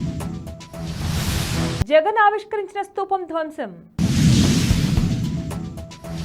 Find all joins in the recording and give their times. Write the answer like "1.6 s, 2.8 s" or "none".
1.6 s